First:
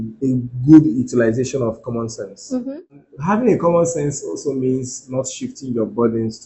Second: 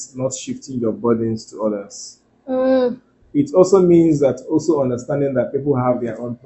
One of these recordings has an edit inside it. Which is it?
first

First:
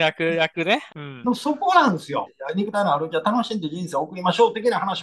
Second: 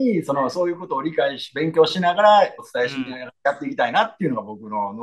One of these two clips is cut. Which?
first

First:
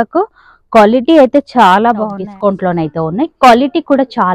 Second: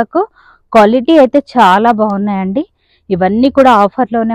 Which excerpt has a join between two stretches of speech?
first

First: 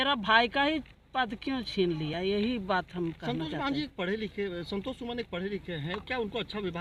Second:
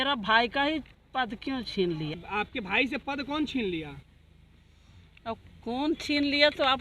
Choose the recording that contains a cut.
second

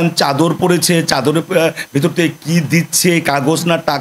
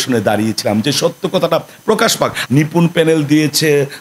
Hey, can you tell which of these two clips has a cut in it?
second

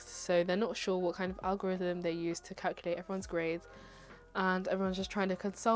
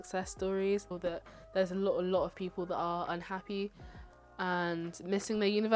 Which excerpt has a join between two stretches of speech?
second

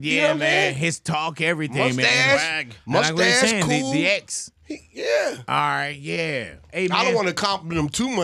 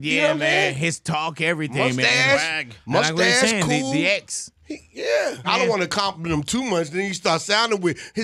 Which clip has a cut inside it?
second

